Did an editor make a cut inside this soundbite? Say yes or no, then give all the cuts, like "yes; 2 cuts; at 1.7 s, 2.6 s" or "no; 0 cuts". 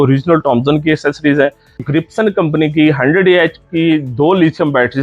yes; 1 cut; at 1.8 s